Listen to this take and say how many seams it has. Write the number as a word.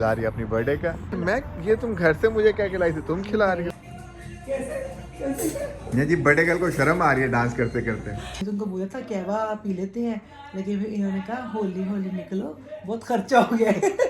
three